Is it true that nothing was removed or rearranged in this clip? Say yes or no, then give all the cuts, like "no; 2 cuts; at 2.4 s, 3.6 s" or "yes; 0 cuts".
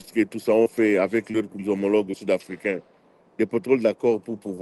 yes; 0 cuts